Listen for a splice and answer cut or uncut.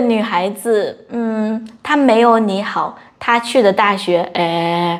uncut